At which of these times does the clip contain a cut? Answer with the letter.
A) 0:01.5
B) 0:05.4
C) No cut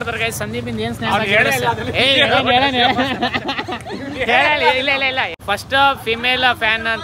B